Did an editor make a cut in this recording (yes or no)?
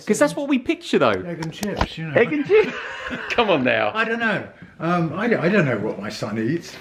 no